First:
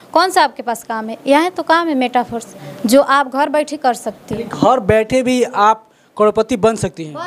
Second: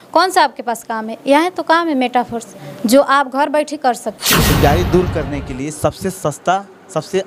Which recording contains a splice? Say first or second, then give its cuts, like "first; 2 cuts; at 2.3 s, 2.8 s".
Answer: second; 1 cut; at 4.5 s